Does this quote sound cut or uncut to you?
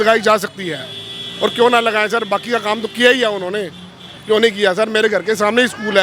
uncut